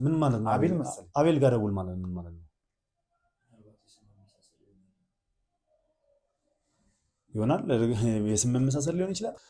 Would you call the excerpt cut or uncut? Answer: uncut